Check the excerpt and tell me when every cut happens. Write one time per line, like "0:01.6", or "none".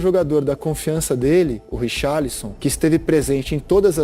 0:01.7
0:02.5